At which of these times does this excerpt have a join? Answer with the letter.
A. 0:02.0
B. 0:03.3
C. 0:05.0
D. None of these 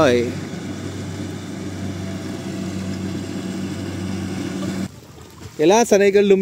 C